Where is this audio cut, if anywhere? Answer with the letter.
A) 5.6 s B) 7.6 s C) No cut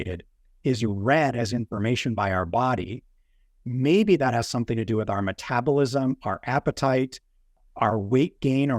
B